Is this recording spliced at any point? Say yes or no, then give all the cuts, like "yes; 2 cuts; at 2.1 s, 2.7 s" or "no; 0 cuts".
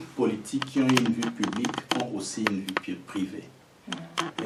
no; 0 cuts